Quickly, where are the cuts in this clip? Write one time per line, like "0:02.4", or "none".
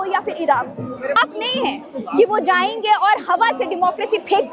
0:01.2